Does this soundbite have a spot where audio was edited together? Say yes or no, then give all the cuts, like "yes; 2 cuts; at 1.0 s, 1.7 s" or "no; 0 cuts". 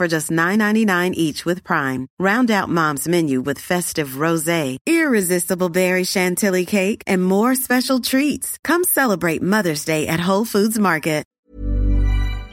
yes; 1 cut; at 11.3 s